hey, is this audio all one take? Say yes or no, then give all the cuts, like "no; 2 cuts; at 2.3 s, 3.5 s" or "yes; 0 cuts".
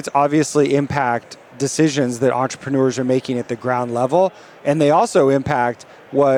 yes; 0 cuts